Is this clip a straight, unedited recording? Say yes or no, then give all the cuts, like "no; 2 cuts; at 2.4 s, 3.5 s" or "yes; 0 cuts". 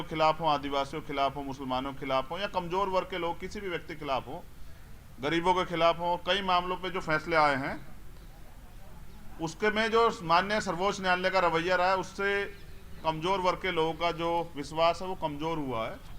yes; 0 cuts